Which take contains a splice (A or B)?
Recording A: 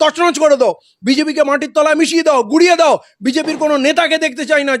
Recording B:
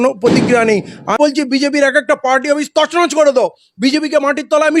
B